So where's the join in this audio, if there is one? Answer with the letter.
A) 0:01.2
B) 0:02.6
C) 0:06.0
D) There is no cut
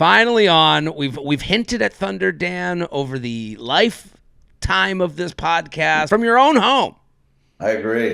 C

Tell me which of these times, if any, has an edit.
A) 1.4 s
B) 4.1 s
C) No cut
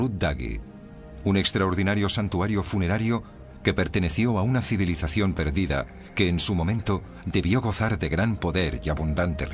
B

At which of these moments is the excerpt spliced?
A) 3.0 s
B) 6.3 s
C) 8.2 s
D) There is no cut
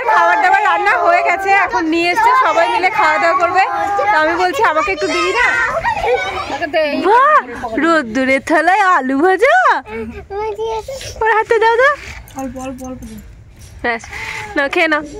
B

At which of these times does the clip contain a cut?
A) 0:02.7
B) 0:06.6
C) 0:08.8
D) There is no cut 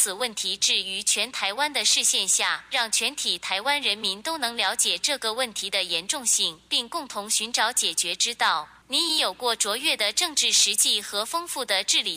C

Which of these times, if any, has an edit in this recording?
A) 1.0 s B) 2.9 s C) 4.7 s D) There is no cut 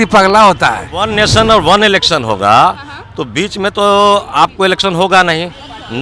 A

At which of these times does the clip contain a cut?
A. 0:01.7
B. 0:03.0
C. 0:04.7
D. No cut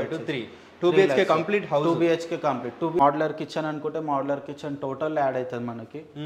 B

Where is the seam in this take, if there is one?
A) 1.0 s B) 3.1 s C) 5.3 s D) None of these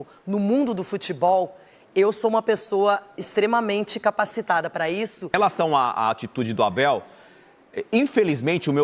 C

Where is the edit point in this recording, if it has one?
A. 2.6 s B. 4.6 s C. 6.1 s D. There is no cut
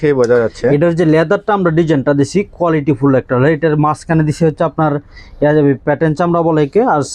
D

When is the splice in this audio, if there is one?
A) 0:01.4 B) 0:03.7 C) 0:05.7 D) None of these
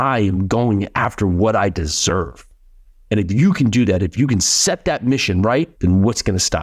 C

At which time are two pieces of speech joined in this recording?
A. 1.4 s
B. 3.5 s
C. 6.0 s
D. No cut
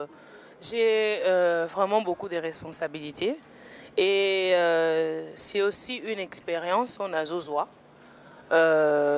D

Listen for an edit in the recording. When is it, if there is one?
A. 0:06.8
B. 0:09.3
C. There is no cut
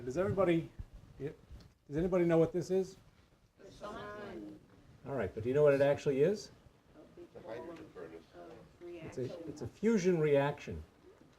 C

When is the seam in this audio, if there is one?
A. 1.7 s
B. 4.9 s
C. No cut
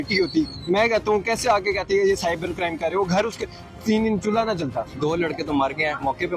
B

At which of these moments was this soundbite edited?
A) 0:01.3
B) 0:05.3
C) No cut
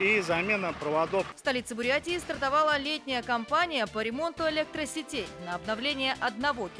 A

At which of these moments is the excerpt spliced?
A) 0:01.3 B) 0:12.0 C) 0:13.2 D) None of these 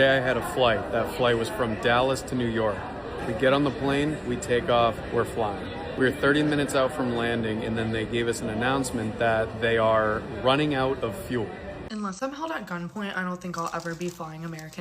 B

